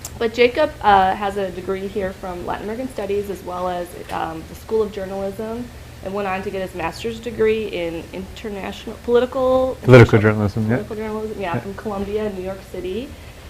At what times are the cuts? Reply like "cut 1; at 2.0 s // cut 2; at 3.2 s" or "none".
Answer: cut 1; at 9.1 s